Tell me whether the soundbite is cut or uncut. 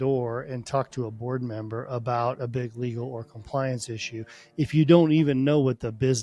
uncut